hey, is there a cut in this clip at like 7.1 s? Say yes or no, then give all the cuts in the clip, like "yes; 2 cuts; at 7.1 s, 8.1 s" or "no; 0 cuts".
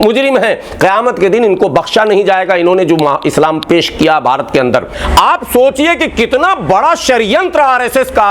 no; 1 cut; at 5.0 s